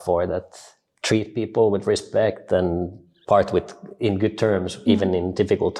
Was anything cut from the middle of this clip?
no; 0 cuts

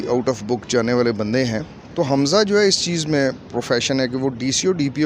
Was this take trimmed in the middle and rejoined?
yes; 1 cut; at 1.8 s

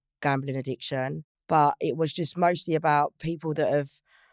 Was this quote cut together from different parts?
yes; 1 cut; at 1.3 s

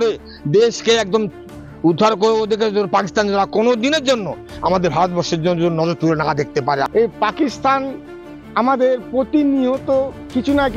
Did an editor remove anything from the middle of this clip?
yes; 1 cut; at 6.9 s

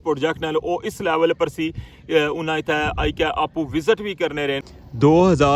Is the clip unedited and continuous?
no; 1 cut; at 4.6 s

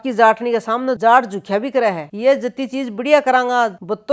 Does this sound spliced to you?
yes; 1 cut; at 2.0 s

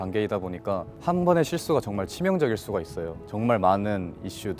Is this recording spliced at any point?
yes; 2 cuts; at 0.9 s, 3.2 s

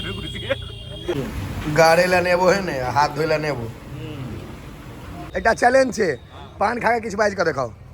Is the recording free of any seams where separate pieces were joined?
no; 2 cuts; at 1.1 s, 5.3 s

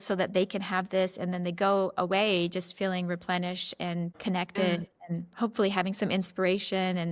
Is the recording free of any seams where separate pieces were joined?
yes; 0 cuts

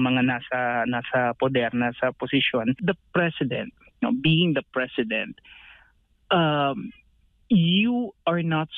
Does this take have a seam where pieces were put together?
yes; 1 cut; at 2.8 s

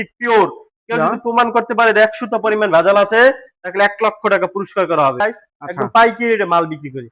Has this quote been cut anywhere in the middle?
yes; 1 cut; at 5.2 s

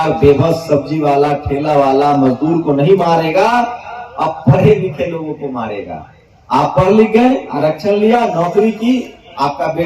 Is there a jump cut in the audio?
no; 0 cuts

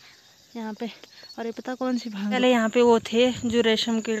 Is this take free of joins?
no; 1 cut; at 2.4 s

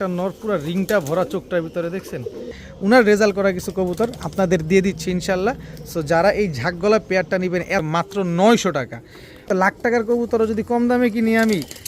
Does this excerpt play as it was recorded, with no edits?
no; 3 cuts; at 2.6 s, 7.8 s, 9.4 s

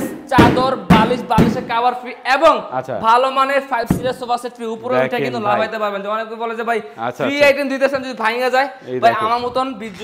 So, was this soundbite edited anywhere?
no; 0 cuts

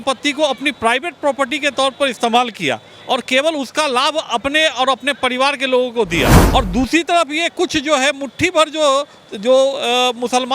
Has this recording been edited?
yes; 1 cut; at 6.4 s

